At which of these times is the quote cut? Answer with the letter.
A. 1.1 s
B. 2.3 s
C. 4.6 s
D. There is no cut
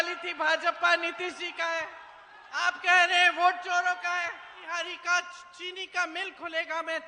C